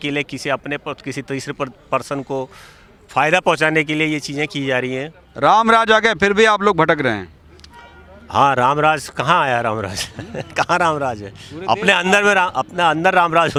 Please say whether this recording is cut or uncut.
uncut